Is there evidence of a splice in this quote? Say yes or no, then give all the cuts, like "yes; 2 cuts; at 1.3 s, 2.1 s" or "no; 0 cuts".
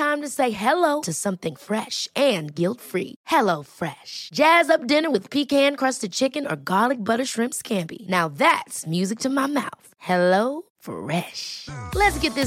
no; 0 cuts